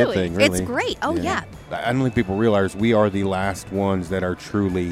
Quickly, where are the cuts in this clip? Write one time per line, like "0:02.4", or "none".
0:01.5

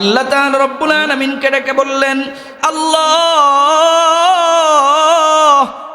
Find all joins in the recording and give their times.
0:02.5

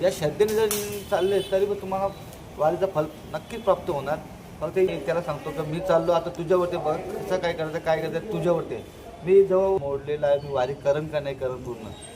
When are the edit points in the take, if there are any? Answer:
0:04.9
0:09.8

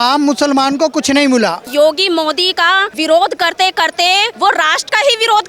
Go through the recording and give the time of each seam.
0:01.6
0:02.9
0:04.3

